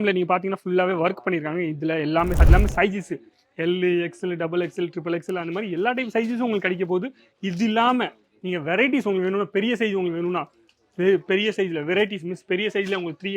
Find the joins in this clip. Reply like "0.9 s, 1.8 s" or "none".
2.4 s